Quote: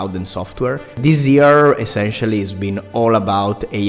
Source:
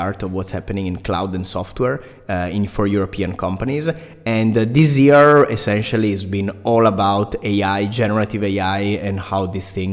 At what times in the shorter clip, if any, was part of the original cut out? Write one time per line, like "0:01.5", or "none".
0:01.0